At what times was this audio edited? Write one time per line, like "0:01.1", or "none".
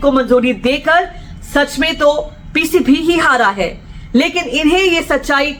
none